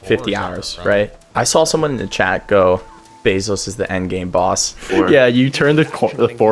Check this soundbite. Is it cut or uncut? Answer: cut